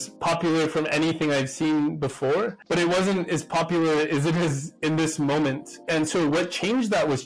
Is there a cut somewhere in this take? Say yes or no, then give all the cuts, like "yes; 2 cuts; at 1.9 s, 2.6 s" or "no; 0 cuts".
no; 0 cuts